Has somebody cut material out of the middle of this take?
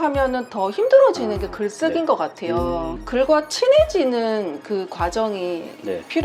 yes; 1 cut; at 3.0 s

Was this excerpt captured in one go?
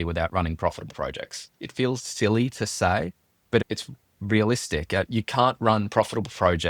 yes; 0 cuts

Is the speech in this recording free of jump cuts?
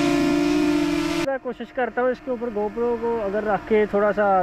no; 1 cut; at 1.2 s

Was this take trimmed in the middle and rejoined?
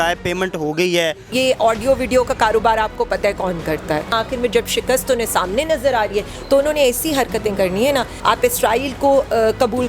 yes; 3 cuts; at 1.2 s, 4.1 s, 8.1 s

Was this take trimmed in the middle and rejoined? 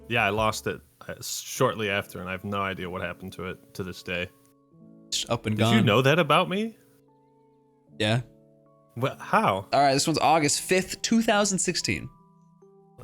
yes; 1 cut; at 9.6 s

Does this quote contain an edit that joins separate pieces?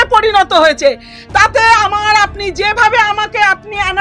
no; 0 cuts

